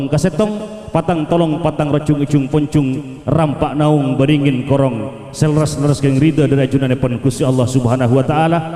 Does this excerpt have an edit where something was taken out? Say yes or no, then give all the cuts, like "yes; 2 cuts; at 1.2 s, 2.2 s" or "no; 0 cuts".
no; 0 cuts